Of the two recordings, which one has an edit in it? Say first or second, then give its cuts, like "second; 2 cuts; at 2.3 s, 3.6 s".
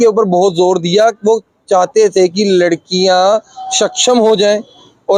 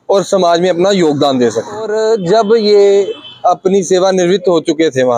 second; 1 cut; at 1.9 s